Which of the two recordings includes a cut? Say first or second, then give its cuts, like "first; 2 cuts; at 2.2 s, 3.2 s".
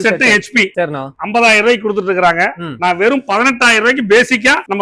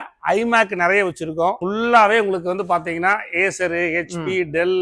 second; 1 cut; at 1.6 s